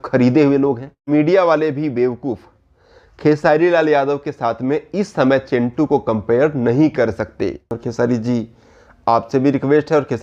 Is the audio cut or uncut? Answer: cut